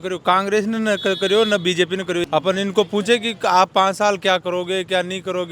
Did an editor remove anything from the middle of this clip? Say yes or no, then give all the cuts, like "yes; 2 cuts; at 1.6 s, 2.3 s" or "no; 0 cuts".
yes; 1 cut; at 2.2 s